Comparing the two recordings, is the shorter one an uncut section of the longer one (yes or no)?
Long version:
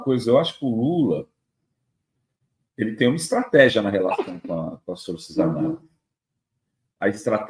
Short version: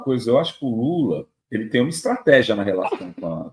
no